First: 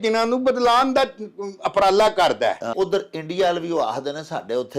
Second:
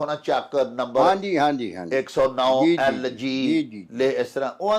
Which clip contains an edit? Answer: first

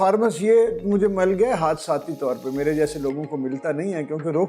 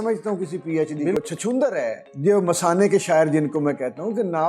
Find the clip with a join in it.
second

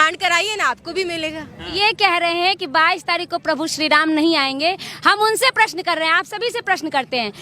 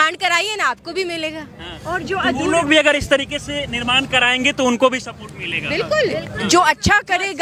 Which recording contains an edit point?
first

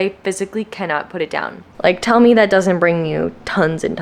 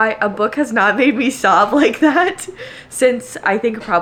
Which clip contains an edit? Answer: first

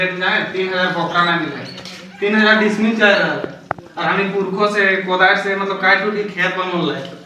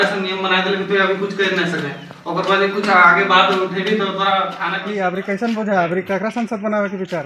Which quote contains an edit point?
second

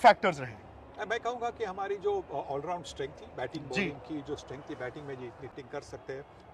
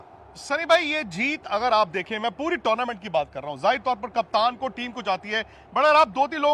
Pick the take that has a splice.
first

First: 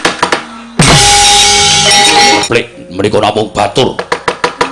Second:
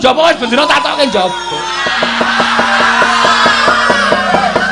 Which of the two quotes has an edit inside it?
first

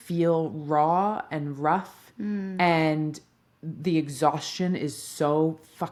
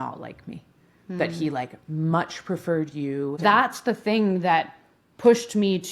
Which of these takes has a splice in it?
second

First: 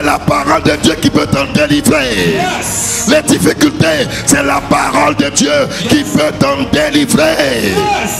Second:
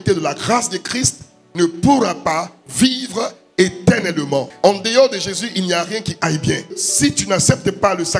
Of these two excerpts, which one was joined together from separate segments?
second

